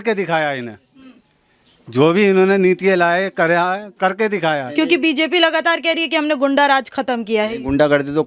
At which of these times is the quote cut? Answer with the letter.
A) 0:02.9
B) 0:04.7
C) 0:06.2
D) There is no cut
B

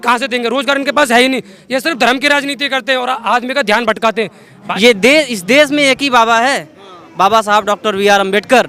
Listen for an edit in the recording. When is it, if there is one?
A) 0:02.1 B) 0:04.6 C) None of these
B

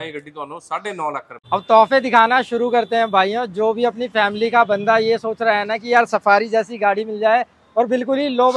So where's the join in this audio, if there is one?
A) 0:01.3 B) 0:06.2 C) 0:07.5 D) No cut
A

